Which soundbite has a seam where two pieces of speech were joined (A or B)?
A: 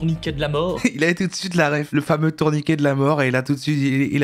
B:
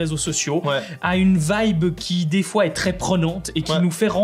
A